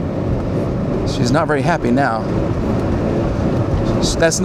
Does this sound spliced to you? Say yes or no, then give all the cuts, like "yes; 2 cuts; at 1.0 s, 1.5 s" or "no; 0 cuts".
no; 0 cuts